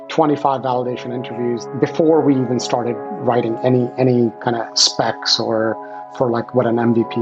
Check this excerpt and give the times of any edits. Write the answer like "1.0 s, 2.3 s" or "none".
1.7 s